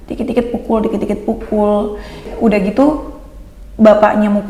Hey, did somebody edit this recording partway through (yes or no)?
no